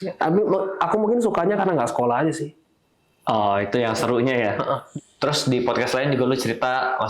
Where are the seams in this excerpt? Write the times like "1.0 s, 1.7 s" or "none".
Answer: 4.9 s

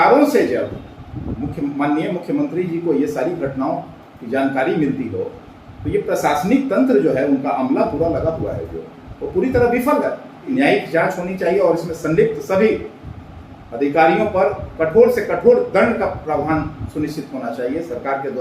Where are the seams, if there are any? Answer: 10.4 s

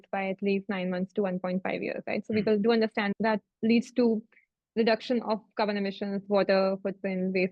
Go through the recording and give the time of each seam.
none

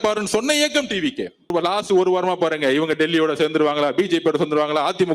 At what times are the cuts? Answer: 1.5 s

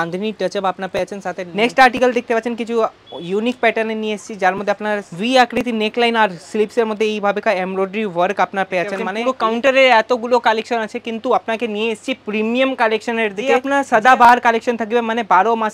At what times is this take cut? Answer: 1.5 s, 9.1 s, 13.6 s

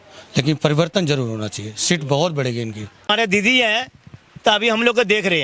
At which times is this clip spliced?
2.9 s

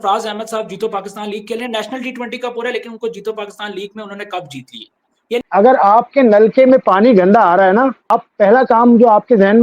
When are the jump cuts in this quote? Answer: 5.4 s, 8.1 s

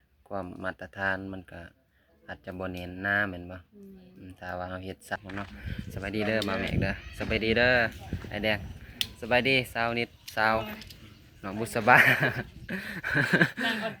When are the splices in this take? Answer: 5.2 s

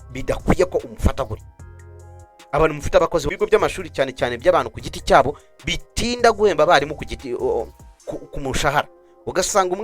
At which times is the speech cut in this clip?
3.3 s

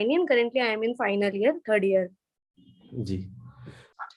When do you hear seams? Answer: none

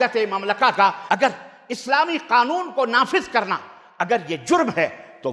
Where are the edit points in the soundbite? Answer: 1.0 s

